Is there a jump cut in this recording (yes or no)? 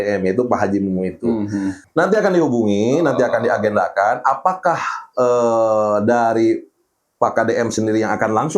yes